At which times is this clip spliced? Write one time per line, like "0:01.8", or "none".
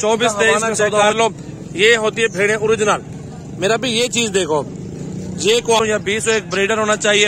0:01.0
0:05.8